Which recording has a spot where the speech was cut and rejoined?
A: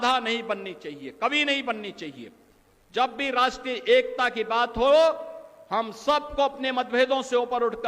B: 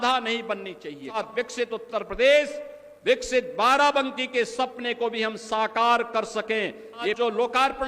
B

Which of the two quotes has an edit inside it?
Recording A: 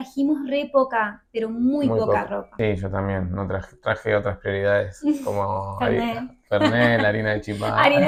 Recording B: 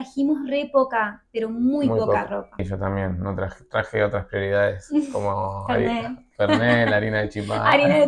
B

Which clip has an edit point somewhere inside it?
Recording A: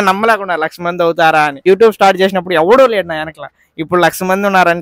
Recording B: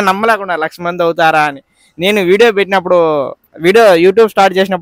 A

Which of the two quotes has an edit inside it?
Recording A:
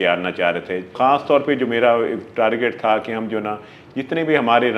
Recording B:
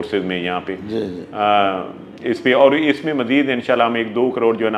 A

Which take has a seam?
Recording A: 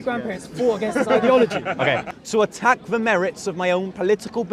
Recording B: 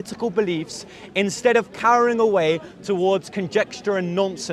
A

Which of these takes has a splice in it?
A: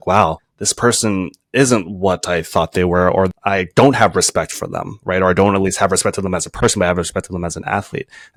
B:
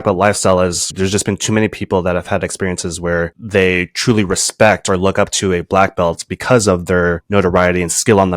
B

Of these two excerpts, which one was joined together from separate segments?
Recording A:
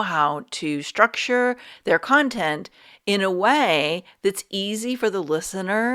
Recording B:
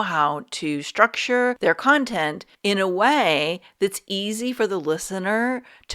B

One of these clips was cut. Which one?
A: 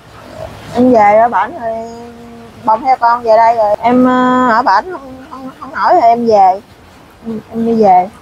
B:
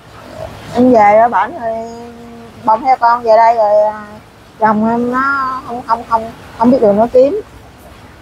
A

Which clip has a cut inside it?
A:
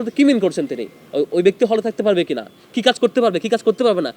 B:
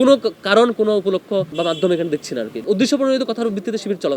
B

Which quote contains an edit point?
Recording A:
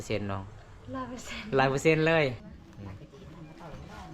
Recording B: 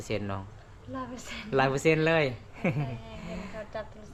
A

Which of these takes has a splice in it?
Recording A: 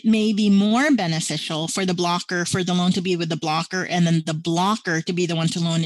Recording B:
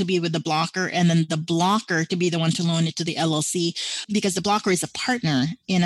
B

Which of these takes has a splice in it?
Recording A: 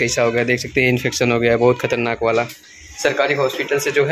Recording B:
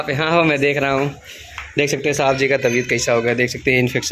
A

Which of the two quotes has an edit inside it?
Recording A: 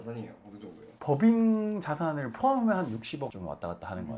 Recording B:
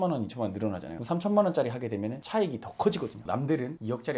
B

